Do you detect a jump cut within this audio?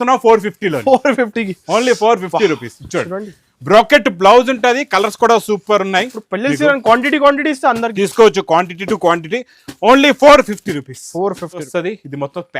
yes; 1 cut; at 11.7 s

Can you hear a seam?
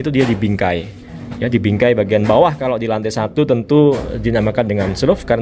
no; 0 cuts

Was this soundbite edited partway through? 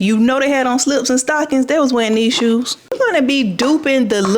yes; 1 cut; at 3.0 s

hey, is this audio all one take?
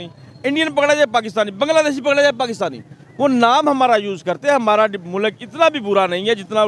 no; 1 cut; at 4.2 s

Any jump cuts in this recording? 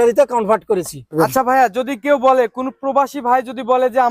yes; 1 cut; at 1.1 s

